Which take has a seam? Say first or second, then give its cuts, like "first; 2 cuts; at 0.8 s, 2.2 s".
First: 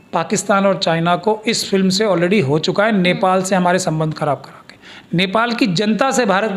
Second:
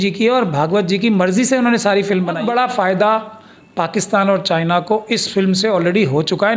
second; 1 cut; at 2.4 s